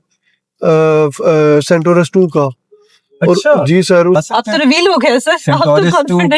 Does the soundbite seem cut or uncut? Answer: cut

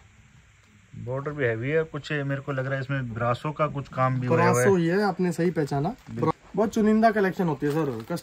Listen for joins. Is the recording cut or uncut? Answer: cut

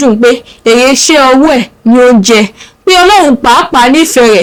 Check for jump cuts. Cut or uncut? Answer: uncut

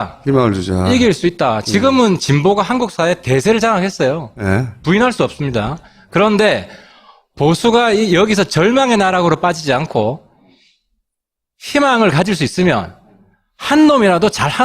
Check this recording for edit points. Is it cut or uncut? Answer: cut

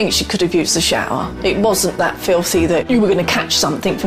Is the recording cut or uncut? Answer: cut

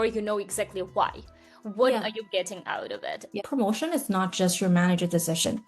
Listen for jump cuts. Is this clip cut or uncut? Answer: cut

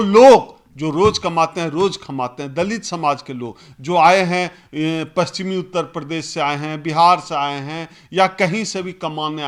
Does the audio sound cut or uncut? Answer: uncut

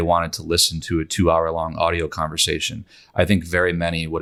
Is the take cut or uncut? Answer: uncut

